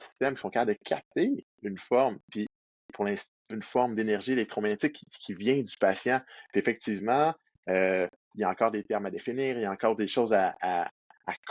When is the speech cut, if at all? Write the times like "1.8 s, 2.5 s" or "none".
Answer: none